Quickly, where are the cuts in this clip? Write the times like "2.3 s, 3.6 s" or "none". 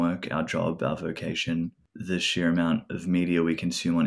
1.9 s